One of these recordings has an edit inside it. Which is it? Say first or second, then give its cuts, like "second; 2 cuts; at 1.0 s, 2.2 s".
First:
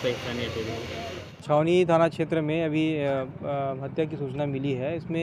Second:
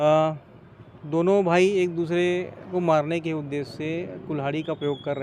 first; 1 cut; at 1.3 s